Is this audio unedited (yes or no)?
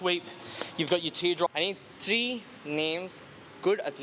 no